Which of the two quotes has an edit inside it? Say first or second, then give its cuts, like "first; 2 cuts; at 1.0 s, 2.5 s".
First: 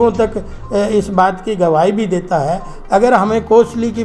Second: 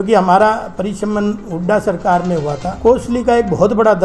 second; 1 cut; at 2.7 s